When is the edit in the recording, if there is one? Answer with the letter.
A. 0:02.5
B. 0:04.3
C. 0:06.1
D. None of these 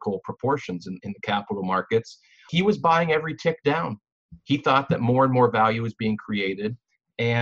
A